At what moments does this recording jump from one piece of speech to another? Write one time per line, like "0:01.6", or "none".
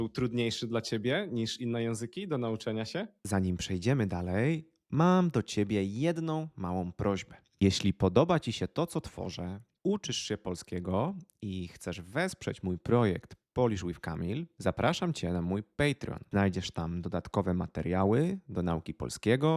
none

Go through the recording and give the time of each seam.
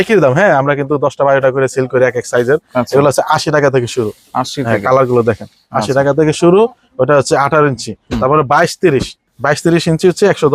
none

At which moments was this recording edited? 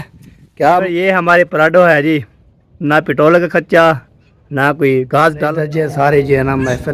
0:00.8
0:05.4

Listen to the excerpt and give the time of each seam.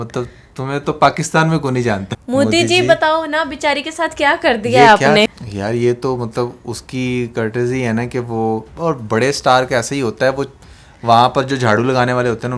0:02.1
0:05.4

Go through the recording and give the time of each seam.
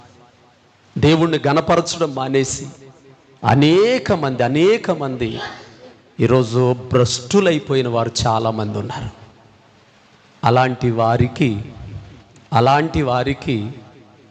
none

